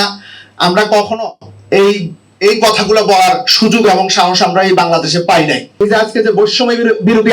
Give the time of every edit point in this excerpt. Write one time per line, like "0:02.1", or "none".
0:05.8